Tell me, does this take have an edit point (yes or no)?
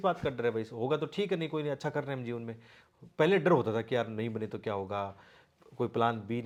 no